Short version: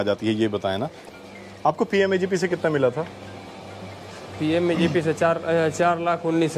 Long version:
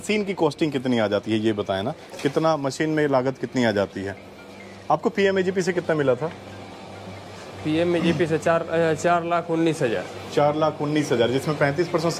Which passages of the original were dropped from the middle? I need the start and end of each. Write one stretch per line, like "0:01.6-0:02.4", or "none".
0:02.1-0:04.3